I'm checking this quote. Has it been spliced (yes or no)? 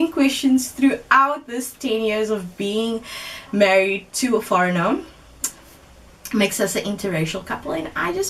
no